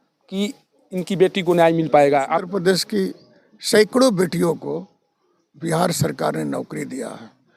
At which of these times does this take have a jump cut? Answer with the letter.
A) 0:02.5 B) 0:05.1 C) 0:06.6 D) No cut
A